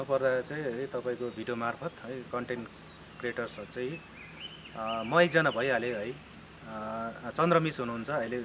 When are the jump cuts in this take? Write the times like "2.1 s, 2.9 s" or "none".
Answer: none